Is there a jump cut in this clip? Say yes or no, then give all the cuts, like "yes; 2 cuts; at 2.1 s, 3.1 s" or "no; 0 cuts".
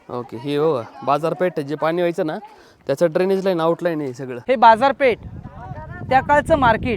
yes; 1 cut; at 4.3 s